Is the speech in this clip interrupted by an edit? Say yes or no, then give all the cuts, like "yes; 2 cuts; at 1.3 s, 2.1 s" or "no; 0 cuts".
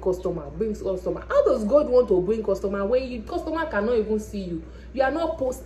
no; 0 cuts